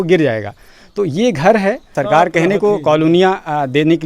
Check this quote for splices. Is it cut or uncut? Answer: cut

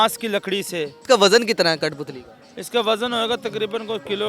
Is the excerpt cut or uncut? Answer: cut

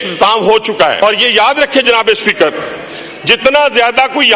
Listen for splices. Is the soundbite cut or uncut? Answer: cut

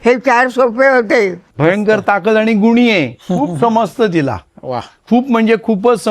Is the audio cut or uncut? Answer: cut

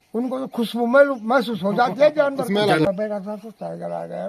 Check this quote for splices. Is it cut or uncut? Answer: cut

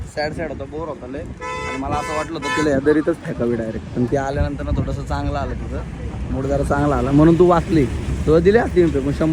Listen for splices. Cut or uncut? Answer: uncut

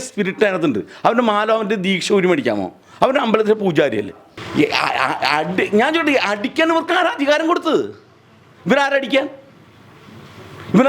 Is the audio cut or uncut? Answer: cut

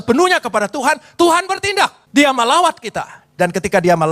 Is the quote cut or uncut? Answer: cut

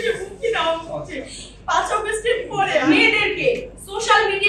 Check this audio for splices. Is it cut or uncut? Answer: cut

